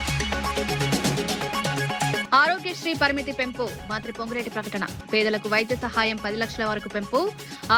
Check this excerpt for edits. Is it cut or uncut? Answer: cut